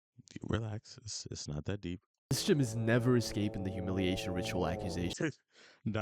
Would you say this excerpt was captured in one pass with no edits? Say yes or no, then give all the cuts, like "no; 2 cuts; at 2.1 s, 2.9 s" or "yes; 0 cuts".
no; 1 cut; at 2.3 s